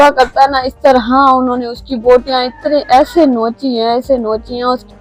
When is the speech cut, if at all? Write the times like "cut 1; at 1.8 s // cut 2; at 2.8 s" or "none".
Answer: none